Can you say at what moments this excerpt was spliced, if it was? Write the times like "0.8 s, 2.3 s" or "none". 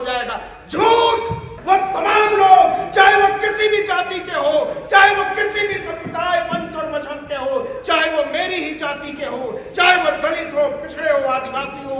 1.5 s